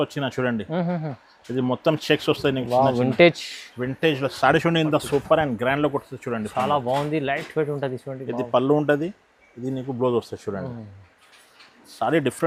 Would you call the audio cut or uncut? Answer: uncut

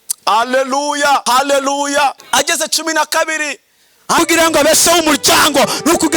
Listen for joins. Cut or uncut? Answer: cut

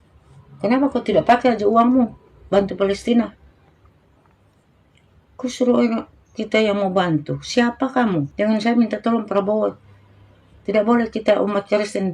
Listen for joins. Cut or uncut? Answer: cut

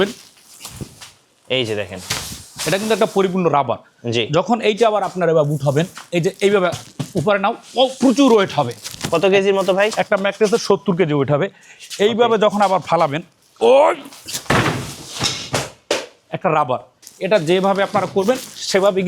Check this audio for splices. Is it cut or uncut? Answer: cut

